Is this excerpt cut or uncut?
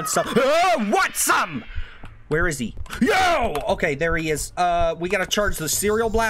cut